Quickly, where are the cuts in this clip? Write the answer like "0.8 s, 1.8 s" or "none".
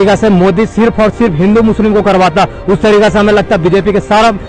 none